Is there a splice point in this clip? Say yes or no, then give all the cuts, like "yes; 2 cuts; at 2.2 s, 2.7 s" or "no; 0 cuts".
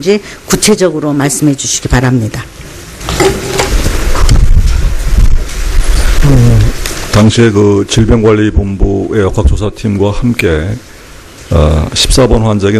no; 0 cuts